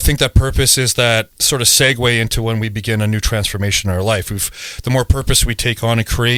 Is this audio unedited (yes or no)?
yes